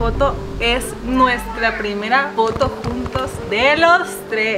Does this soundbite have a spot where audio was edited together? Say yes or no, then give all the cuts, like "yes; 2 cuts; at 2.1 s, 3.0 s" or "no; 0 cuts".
no; 0 cuts